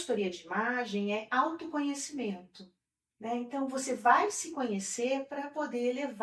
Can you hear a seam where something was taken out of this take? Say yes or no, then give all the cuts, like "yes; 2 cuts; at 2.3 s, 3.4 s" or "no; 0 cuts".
no; 0 cuts